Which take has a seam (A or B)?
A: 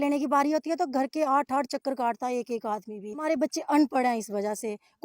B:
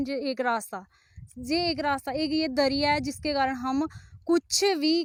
A